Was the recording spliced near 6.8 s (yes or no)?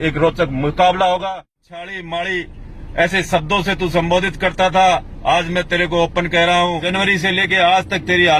yes